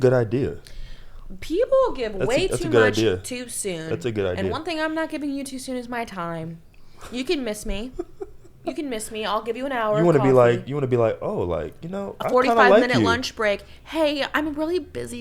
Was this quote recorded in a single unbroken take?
yes; 0 cuts

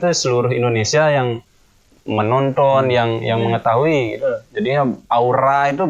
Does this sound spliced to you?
no; 0 cuts

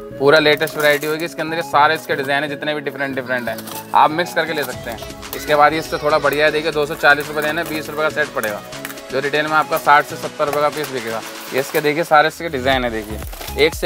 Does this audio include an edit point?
no; 0 cuts

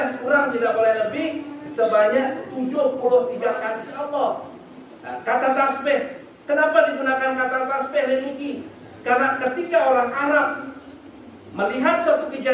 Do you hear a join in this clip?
yes; 1 cut; at 3.8 s

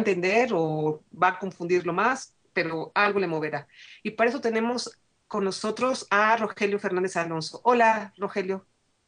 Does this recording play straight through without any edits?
no; 1 cut; at 4.3 s

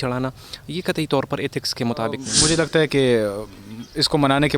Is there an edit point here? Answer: yes; 1 cut; at 2.3 s

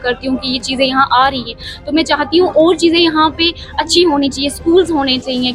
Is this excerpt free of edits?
yes; 0 cuts

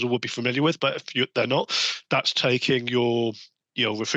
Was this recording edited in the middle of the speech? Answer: no; 0 cuts

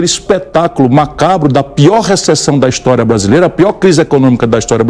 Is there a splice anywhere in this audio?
no; 0 cuts

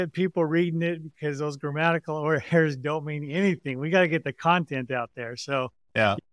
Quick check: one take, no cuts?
yes; 0 cuts

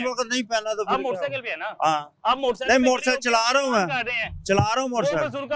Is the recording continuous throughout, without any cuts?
yes; 0 cuts

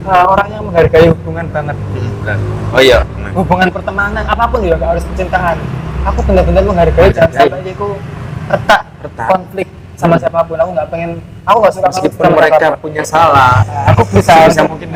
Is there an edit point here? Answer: no; 0 cuts

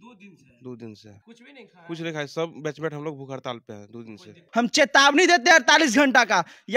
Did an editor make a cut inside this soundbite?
yes; 2 cuts; at 1.1 s, 4.4 s

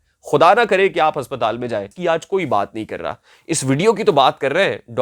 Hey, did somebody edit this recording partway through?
yes; 1 cut; at 1.9 s

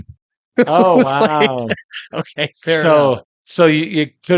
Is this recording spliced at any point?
no; 0 cuts

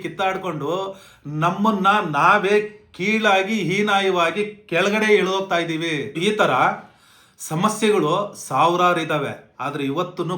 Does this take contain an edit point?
yes; 1 cut; at 6.1 s

